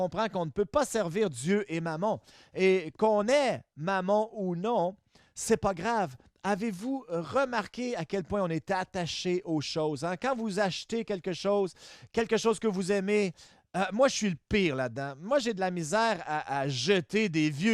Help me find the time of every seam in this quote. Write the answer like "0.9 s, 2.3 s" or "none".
none